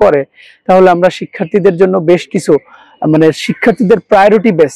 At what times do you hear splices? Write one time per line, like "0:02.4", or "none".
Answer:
none

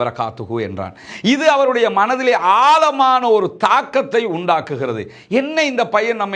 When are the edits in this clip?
none

